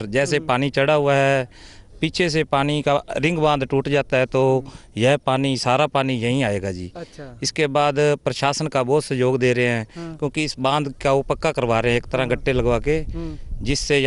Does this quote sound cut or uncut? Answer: uncut